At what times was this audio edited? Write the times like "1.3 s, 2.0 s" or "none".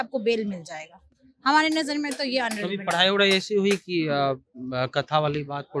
none